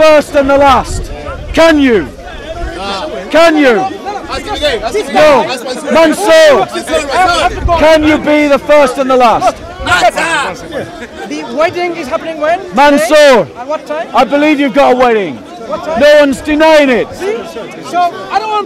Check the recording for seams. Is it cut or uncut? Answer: uncut